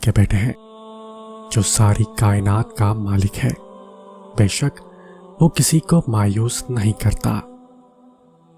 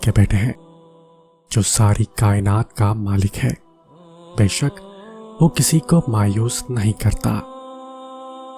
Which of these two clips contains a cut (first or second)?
second